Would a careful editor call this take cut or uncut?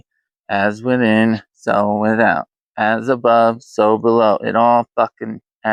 uncut